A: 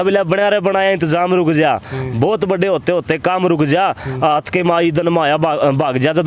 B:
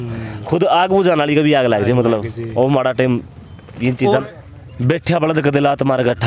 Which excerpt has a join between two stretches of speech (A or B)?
B